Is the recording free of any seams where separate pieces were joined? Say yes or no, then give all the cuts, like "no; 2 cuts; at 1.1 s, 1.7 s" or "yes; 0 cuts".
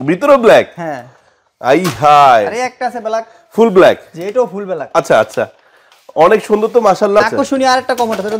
no; 1 cut; at 7.2 s